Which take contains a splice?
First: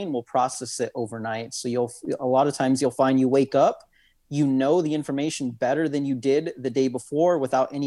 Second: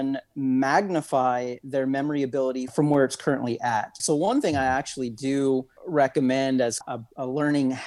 second; 4 cuts; at 2.7 s, 4.0 s, 5.8 s, 6.8 s

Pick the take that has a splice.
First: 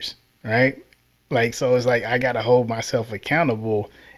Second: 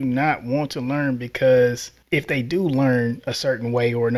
second; 1 cut; at 1.9 s

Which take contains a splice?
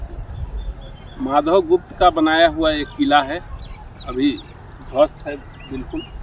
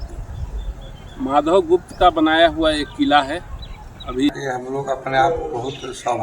second; 1 cut; at 4.4 s

